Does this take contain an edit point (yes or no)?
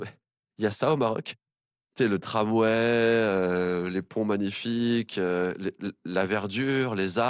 no